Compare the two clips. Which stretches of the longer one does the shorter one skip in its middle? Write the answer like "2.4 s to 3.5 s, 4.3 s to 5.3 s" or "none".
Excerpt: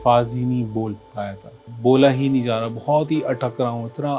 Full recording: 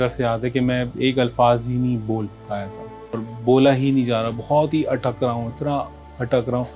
3.0 s to 3.3 s

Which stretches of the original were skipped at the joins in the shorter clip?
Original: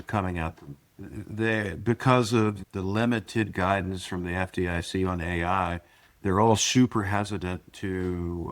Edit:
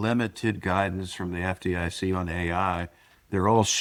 none

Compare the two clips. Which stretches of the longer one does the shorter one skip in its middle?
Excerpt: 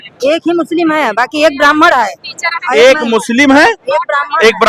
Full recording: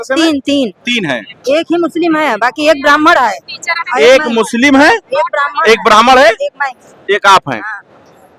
none

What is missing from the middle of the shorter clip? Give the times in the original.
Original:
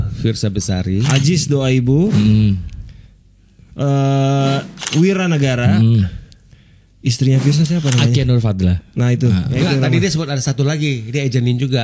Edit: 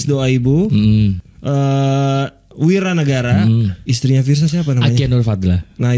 2.7 s to 3.6 s, 6.2 s to 7.0 s

